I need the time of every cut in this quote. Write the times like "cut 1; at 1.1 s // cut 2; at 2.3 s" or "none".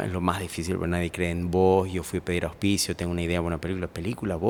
none